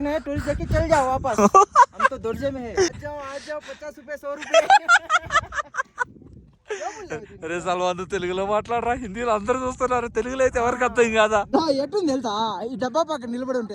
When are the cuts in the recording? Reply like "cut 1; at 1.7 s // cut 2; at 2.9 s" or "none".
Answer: cut 1; at 3.0 s // cut 2; at 11.5 s